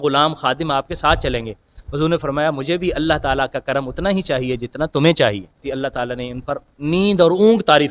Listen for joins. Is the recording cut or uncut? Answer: cut